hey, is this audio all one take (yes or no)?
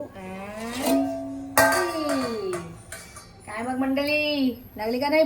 yes